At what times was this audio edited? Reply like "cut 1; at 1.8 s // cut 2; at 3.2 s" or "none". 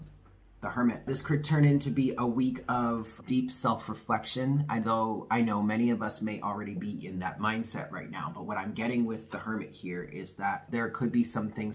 cut 1; at 1.1 s // cut 2; at 3.1 s // cut 3; at 10.6 s